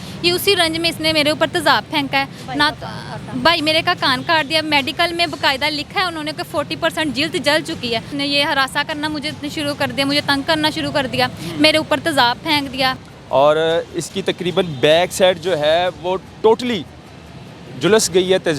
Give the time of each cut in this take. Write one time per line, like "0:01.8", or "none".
0:08.1
0:13.0